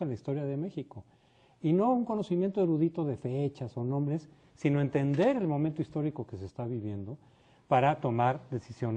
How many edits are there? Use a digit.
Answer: 0